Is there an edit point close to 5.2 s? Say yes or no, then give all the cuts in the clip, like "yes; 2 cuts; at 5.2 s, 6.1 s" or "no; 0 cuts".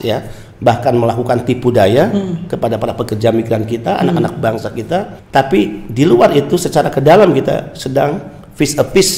yes; 1 cut; at 5.2 s